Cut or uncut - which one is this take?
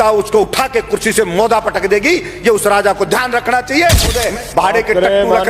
cut